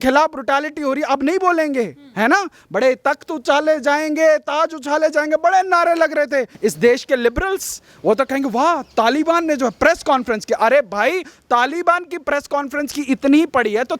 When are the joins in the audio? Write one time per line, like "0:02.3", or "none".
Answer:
0:06.5

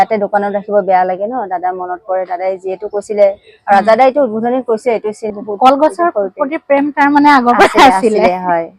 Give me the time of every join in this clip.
0:05.3

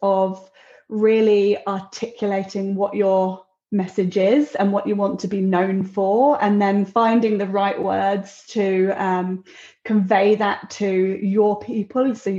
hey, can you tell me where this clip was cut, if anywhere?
none

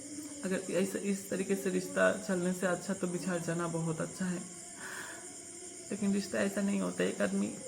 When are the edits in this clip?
none

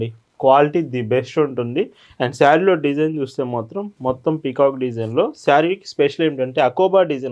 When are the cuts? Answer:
none

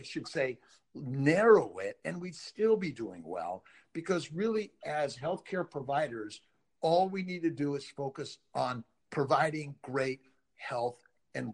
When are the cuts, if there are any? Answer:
0:08.9

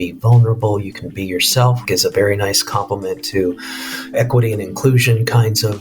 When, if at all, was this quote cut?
0:01.8
0:04.1

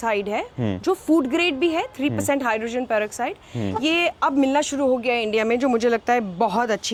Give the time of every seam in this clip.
none

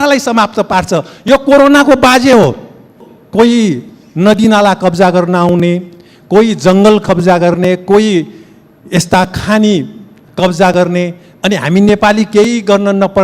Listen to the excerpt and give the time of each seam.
0:03.1

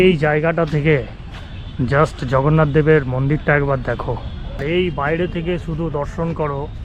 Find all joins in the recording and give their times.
0:04.6

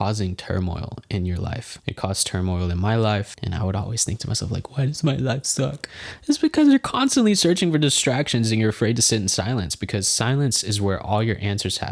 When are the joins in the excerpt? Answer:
0:01.7

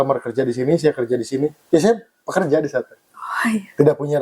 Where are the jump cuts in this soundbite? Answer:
none

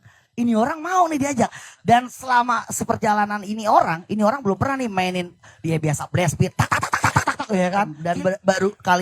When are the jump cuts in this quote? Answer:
0:08.0

